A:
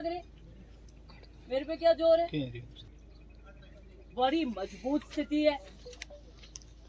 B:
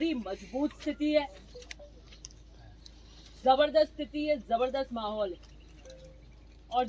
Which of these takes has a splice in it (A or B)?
A